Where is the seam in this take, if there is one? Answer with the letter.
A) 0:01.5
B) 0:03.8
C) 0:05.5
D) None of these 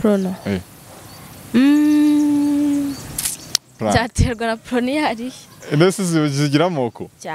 B